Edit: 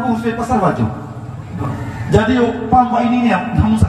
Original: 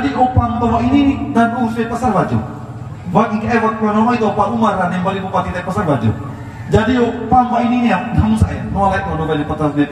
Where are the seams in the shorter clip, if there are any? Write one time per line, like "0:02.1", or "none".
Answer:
0:01.6